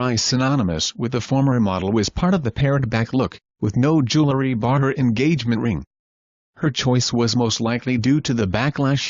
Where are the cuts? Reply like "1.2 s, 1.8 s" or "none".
5.4 s

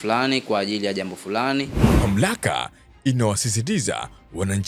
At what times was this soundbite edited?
1.8 s

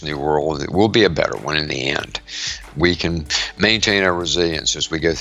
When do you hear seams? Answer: 2.6 s

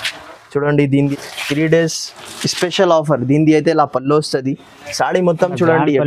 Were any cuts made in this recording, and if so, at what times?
1.0 s

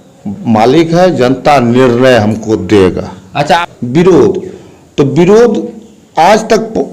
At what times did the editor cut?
3.6 s

